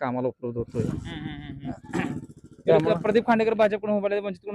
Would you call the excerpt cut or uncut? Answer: uncut